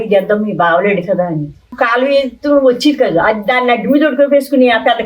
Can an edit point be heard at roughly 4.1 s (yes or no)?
no